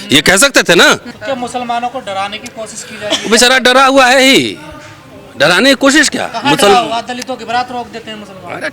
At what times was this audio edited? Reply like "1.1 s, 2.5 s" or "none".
1.1 s